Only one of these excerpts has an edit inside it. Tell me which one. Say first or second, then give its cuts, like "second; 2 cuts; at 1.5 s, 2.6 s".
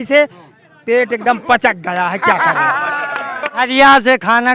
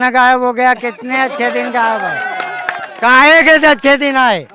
first; 1 cut; at 3.5 s